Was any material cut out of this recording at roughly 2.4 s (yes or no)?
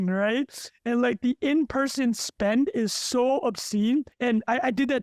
no